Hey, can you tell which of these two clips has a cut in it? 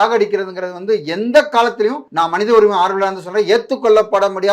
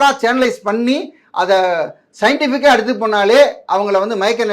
first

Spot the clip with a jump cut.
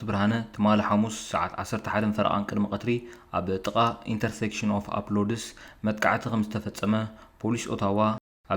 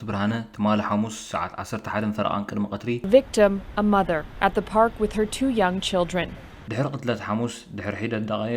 second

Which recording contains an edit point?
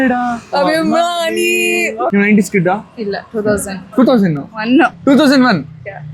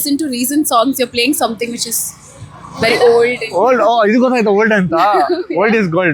first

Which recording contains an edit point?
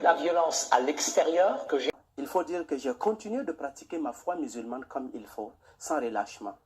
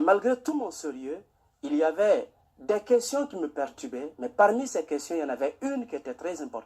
first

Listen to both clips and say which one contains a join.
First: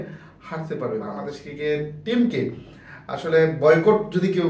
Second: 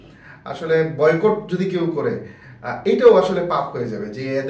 first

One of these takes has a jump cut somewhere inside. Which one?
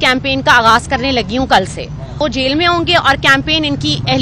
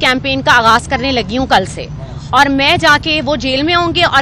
first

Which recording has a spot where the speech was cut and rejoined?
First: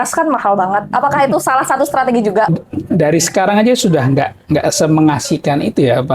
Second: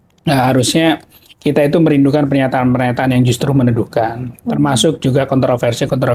first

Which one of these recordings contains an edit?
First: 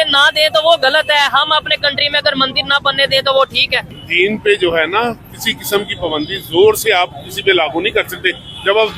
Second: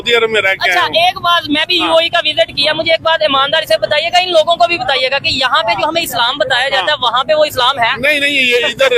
first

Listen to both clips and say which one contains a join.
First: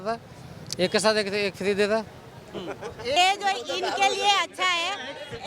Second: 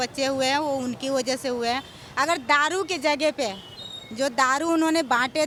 first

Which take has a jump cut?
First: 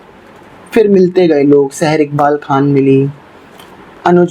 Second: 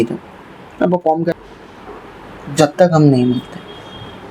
second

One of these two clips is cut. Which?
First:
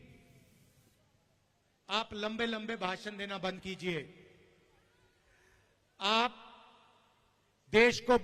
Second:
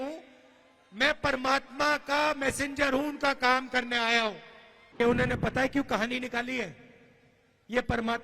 second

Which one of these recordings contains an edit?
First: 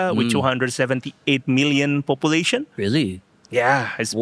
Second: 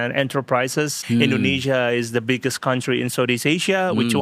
second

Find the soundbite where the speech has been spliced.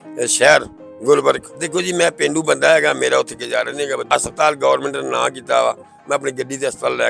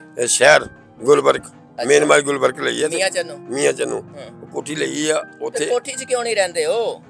first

